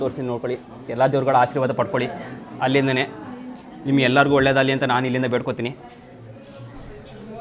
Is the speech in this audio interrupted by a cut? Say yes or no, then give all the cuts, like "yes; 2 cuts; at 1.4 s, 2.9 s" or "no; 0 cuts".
no; 0 cuts